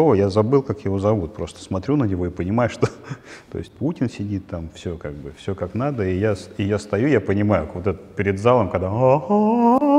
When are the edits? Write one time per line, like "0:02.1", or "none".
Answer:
none